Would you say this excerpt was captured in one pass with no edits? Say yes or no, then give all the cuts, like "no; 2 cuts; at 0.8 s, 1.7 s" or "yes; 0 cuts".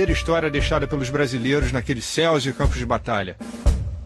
no; 1 cut; at 1.9 s